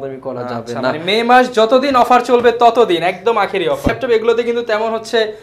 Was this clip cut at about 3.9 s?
yes; 1 cut; at 3.9 s

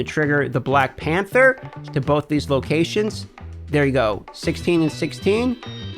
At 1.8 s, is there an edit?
yes; 1 cut; at 1.8 s

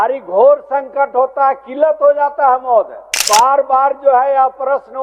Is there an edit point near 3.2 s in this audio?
yes; 1 cut; at 3.2 s

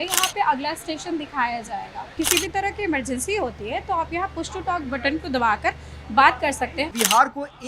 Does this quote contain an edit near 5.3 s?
no; 2 cuts; at 2.1 s, 6.9 s

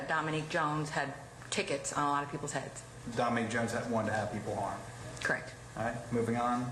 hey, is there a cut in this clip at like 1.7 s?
yes; 1 cut; at 1.7 s

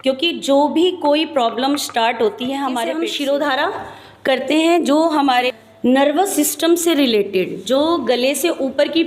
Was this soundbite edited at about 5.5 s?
yes; 2 cuts; at 2.9 s, 5.5 s

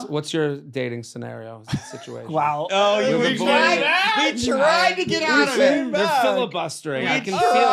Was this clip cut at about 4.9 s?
no; 0 cuts

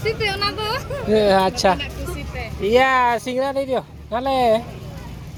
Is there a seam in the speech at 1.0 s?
no; 0 cuts

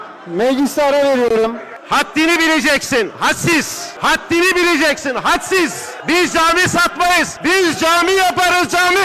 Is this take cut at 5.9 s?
yes; 4 cuts; at 1.7 s, 3.8 s, 5.9 s, 7.3 s

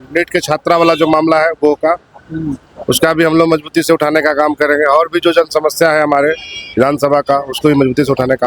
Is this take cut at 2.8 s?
no; 0 cuts

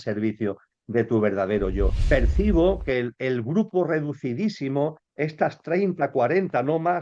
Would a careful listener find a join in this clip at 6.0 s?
no; 1 cut; at 2.0 s

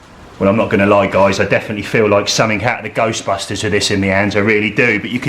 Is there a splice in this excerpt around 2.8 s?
no; 0 cuts

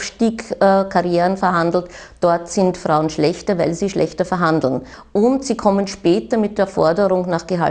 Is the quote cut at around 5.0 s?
yes; 1 cut; at 5.0 s

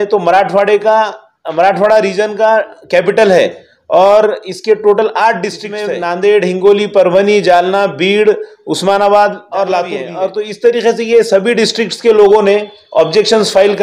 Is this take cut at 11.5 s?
no; 2 cuts; at 5.7 s, 10.0 s

